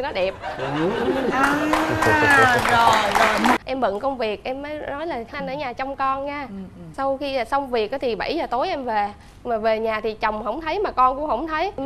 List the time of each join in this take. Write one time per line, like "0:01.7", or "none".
0:03.6